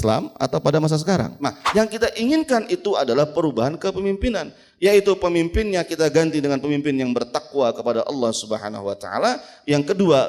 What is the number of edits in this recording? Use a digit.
1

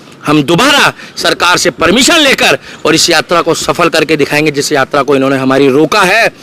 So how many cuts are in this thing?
0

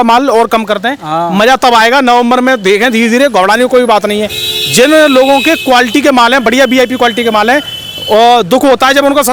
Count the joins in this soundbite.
0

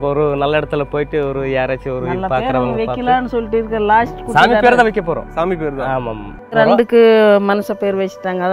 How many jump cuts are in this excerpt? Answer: 1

